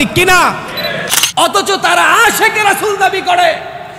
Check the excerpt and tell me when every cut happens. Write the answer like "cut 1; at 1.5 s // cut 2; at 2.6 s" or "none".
cut 1; at 1.1 s